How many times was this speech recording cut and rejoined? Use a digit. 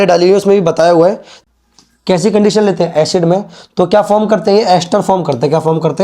1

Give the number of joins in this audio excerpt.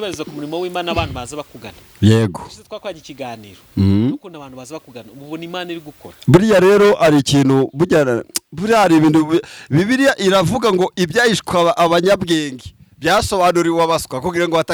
0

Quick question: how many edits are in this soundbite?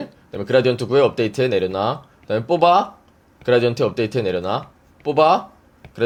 0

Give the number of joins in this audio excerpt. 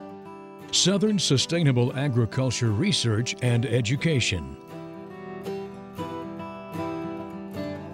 1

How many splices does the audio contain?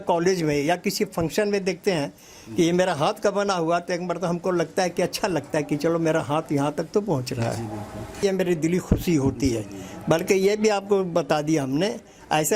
1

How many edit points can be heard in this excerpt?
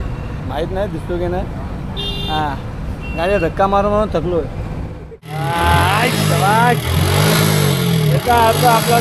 1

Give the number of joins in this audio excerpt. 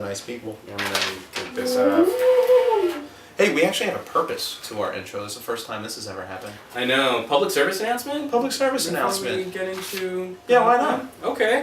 1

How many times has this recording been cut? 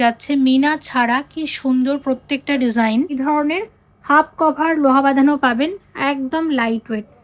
1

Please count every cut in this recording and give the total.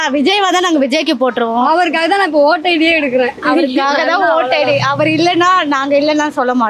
0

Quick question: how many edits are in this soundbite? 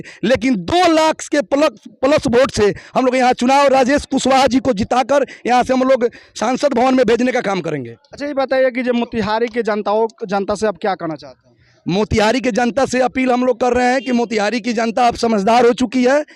0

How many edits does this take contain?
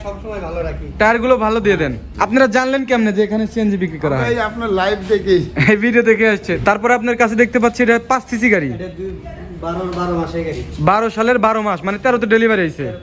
2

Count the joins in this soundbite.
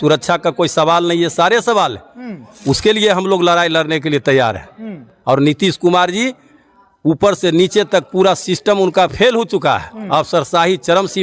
0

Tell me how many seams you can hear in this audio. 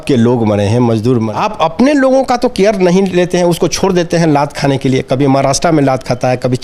1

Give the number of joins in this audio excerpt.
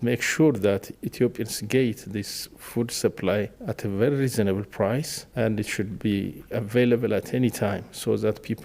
3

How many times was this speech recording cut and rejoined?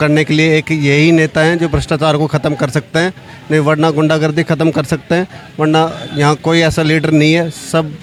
0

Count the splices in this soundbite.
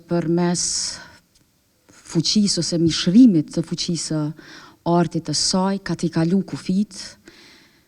0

